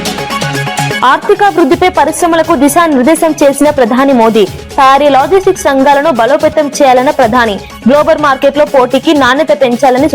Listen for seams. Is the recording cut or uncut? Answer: cut